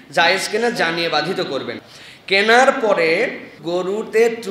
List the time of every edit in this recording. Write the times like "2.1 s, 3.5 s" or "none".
1.8 s, 3.5 s